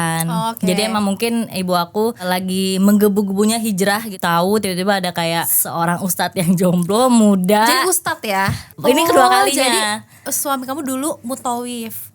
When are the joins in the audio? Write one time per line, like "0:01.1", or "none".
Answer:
0:02.2
0:04.1
0:05.6
0:08.6

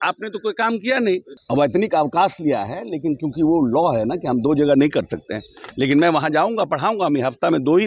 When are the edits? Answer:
0:01.3

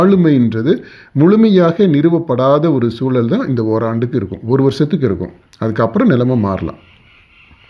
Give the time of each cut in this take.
none

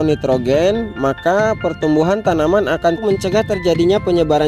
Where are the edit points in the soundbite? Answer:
0:03.0

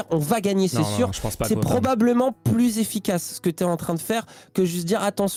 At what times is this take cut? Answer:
none

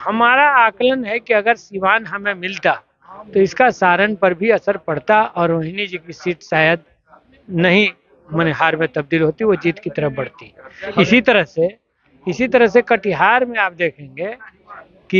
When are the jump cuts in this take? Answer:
none

